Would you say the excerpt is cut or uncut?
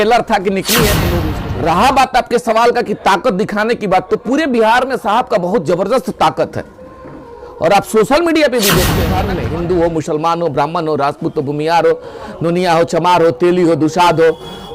cut